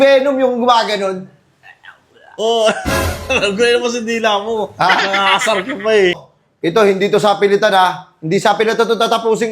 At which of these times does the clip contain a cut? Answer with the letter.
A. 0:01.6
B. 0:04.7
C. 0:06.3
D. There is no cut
C